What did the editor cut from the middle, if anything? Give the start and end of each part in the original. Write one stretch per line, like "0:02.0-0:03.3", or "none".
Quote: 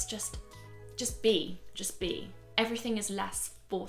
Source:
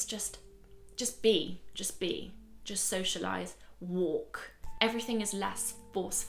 0:02.4-0:04.6